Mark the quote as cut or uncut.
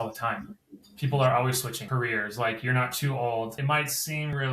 cut